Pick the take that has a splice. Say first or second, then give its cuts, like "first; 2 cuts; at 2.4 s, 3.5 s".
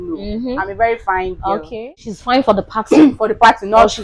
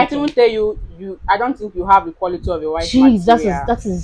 first; 1 cut; at 2.1 s